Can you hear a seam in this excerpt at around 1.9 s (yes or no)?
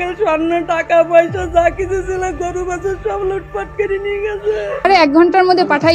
no